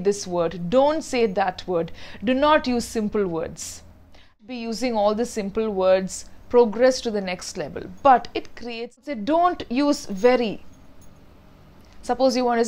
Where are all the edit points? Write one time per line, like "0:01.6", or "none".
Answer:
0:04.4
0:09.0